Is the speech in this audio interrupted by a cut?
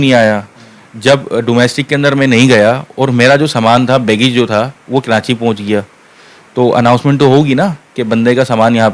no; 0 cuts

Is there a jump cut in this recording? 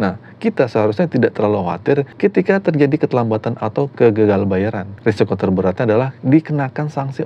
yes; 2 cuts; at 2.1 s, 4.9 s

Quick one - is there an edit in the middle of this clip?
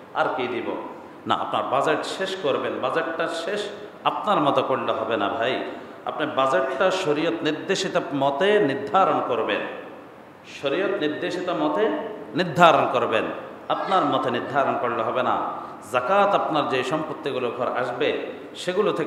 no; 0 cuts

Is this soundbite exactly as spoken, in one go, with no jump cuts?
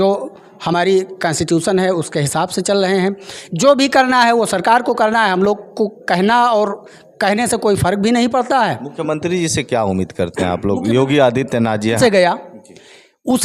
no; 1 cut; at 12.0 s

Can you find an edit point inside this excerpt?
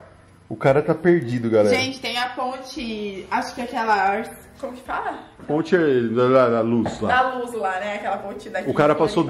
no; 0 cuts

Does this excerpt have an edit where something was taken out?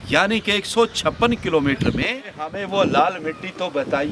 yes; 1 cut; at 2.6 s

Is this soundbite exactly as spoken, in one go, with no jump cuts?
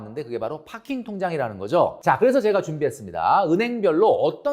no; 1 cut; at 2.0 s

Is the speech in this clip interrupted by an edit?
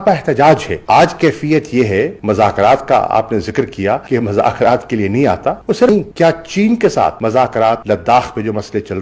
no; 0 cuts

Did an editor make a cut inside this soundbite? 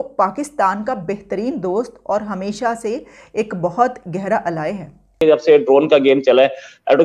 yes; 1 cut; at 5.1 s

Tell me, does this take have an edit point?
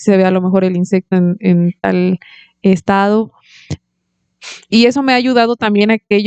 no; 0 cuts

